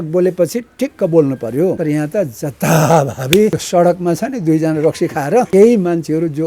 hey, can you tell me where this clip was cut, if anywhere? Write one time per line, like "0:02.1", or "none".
0:01.8
0:03.6
0:05.5